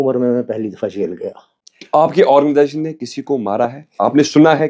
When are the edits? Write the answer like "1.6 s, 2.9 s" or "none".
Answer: 1.1 s